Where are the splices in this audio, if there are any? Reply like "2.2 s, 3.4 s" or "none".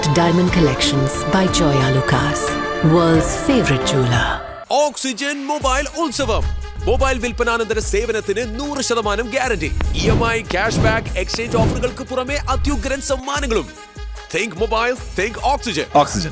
none